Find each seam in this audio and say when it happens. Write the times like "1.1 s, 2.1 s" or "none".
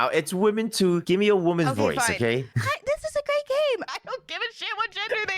1.0 s, 2.6 s, 3.9 s